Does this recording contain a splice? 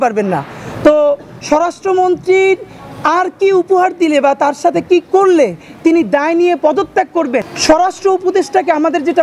yes; 1 cut; at 7.5 s

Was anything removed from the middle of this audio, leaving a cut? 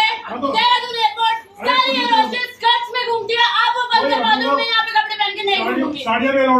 no; 0 cuts

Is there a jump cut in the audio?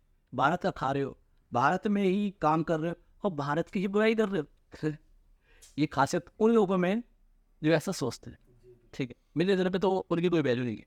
no; 0 cuts

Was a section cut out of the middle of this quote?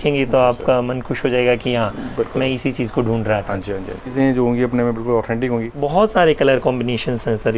yes; 2 cuts; at 4.1 s, 5.7 s

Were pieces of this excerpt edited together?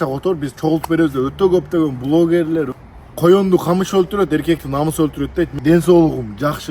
yes; 2 cuts; at 2.8 s, 5.5 s

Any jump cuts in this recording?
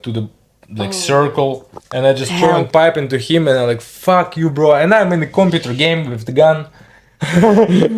no; 0 cuts

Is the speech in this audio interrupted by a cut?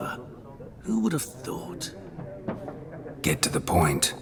no; 0 cuts

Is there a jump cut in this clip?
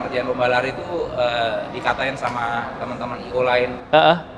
no; 0 cuts

